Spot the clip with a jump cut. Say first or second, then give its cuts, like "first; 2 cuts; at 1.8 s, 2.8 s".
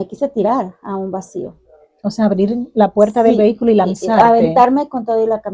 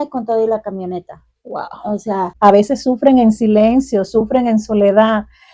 second; 1 cut; at 2.3 s